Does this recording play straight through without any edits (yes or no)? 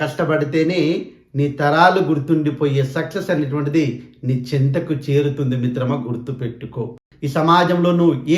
no